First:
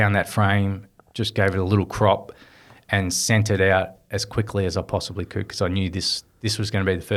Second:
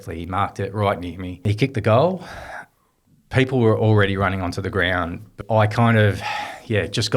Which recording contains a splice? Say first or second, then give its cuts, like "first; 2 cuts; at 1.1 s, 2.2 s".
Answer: second; 2 cuts; at 1.5 s, 5.4 s